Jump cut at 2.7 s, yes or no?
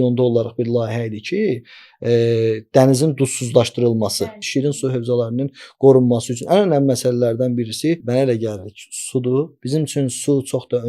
no